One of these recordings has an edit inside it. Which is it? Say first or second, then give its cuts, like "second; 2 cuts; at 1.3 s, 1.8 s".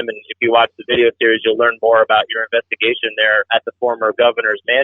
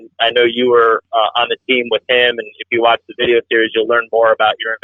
first; 1 cut; at 3.5 s